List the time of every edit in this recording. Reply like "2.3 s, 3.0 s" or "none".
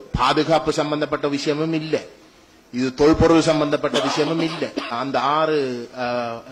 5.0 s

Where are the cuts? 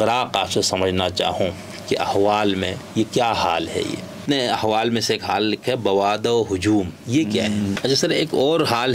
4.2 s, 7.8 s

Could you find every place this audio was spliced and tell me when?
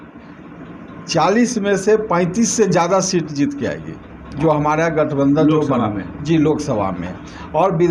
none

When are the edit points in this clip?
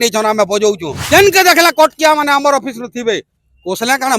0.9 s

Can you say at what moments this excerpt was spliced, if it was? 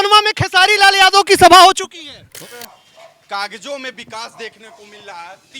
2.3 s

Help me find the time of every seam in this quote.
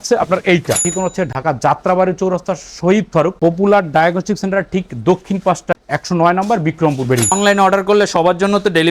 0.9 s, 7.3 s

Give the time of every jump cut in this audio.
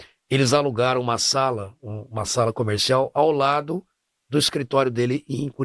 none

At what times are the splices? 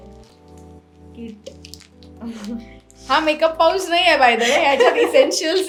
none

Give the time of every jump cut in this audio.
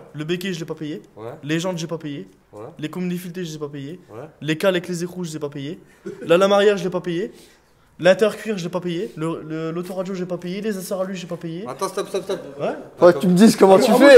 none

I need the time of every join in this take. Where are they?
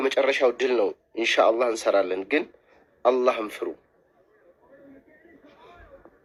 none

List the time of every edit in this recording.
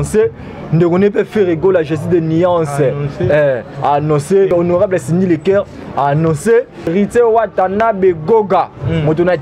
4.5 s, 6.9 s

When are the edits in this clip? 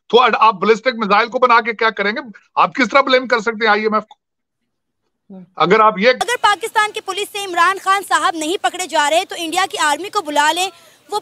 6.2 s

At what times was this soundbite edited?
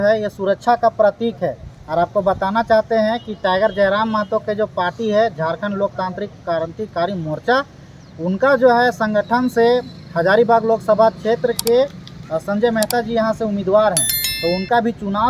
none

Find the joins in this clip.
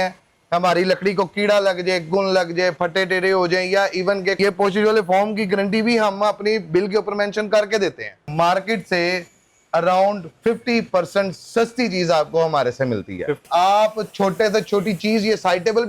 4.4 s, 8.3 s, 13.4 s

